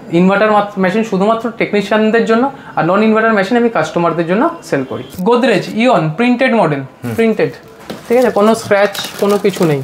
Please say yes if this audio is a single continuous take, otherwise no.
no